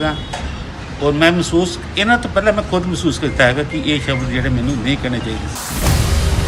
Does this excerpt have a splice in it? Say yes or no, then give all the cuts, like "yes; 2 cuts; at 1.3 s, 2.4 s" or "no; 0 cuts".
yes; 1 cut; at 5.5 s